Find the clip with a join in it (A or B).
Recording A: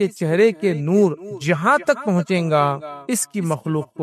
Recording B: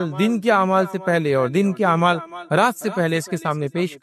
A